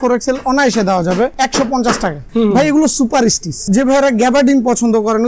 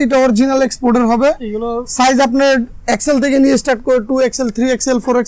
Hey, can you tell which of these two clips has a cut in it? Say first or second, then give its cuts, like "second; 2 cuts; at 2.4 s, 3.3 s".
first; 3 cuts; at 1.3 s, 2.2 s, 3.6 s